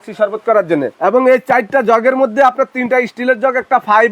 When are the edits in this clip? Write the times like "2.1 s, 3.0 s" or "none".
0.9 s